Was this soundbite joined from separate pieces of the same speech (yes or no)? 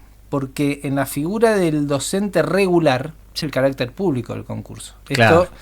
yes